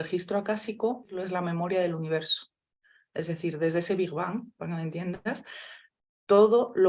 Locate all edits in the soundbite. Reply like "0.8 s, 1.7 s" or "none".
1.2 s

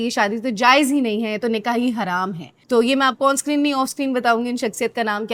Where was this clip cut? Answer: none

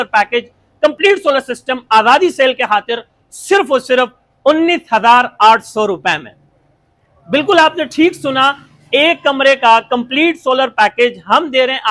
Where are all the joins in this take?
none

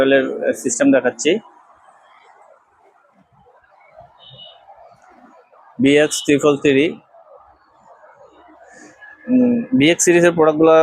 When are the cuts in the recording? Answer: none

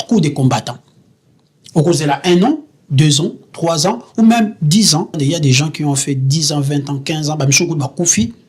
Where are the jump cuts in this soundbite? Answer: 5.2 s

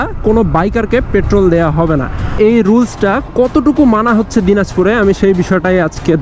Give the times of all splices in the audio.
2.4 s

